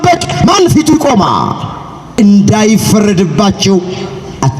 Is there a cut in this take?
yes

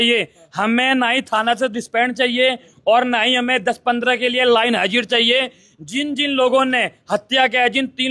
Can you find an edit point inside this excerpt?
no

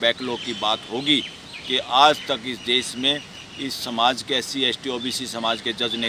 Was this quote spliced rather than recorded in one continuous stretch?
no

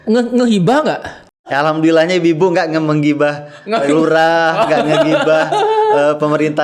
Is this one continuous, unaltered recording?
no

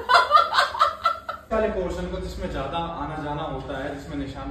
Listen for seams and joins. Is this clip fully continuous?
no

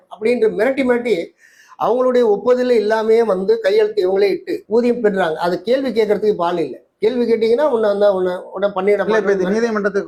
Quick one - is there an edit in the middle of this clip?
no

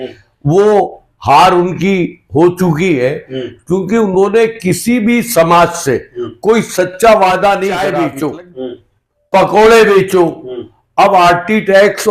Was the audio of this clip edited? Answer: yes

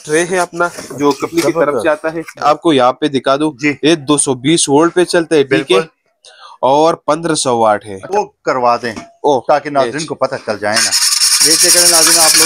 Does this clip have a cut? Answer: yes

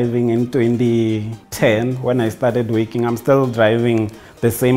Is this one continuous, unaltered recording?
no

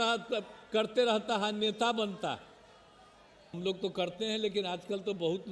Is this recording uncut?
no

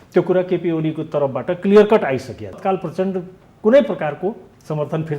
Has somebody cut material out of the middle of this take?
yes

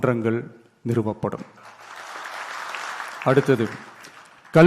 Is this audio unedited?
no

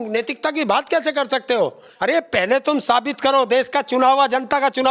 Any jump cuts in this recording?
yes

